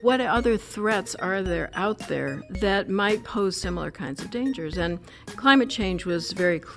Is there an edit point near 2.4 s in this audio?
yes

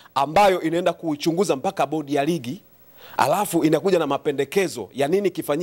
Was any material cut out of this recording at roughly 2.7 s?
no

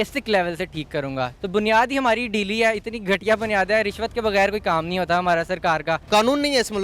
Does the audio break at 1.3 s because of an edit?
yes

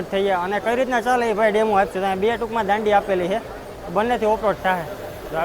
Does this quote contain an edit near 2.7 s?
no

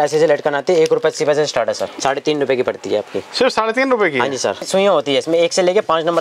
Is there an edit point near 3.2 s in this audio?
no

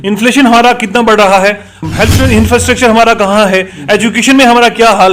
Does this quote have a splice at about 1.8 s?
yes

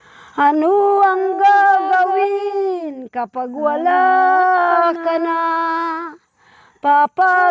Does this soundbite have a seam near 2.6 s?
no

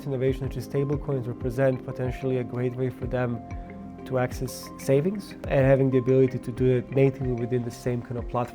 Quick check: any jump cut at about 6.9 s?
yes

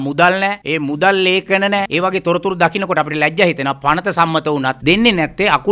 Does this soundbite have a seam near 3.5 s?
no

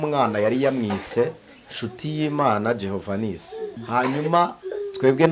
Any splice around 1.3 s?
no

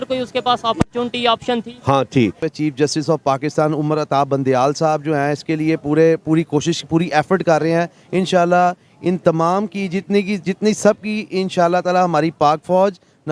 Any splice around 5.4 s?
no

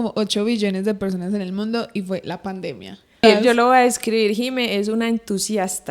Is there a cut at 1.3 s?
no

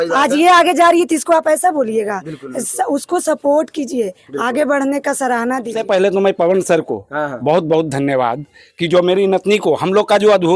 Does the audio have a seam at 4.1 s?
no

